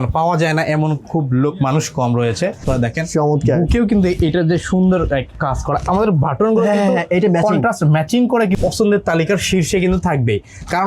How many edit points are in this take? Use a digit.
2